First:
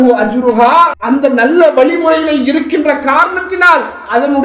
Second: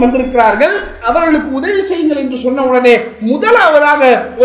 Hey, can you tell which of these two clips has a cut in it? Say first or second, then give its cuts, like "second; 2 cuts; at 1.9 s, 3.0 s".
first; 1 cut; at 1.0 s